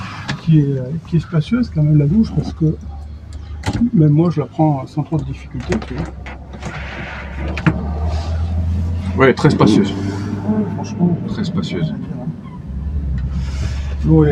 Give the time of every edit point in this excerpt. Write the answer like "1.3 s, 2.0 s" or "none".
none